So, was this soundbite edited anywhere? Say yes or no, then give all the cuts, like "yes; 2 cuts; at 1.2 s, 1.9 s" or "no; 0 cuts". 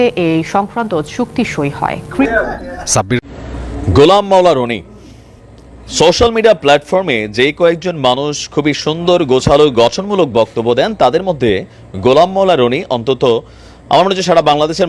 yes; 1 cut; at 2.2 s